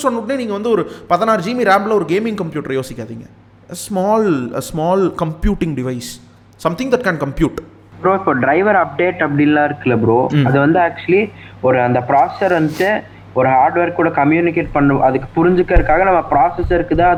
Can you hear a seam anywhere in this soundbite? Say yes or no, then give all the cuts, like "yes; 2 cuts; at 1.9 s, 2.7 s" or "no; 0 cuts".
no; 0 cuts